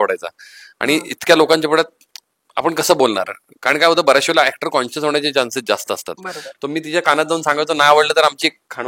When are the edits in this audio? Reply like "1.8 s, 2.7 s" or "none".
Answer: none